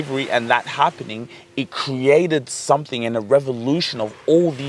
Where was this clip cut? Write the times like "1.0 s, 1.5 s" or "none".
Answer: none